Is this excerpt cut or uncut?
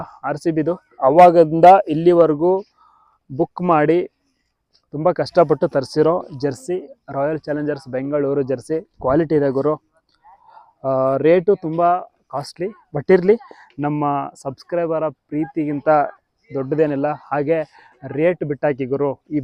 uncut